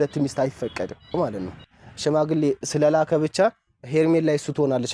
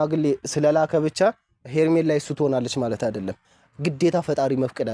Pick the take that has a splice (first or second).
first